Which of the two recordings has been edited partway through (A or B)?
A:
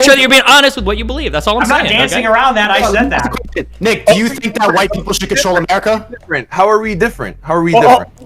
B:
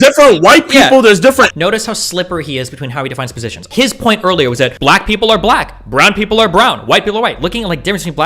B